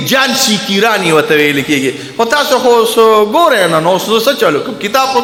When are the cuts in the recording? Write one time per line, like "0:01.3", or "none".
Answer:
none